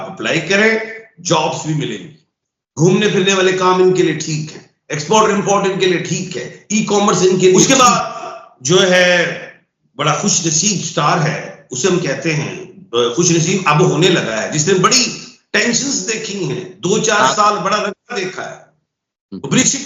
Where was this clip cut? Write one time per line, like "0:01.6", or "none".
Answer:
0:07.6